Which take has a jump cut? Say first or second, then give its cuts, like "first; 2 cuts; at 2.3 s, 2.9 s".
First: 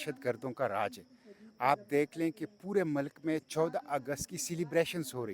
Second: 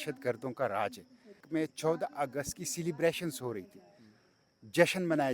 second; 1 cut; at 1.4 s